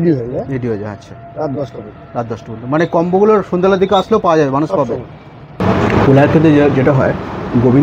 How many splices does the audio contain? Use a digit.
1